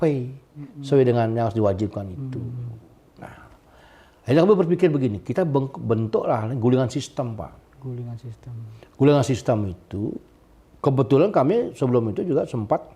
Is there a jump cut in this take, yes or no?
no